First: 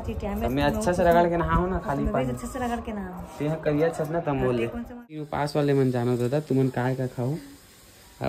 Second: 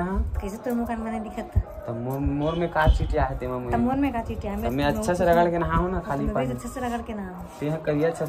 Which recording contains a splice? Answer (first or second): first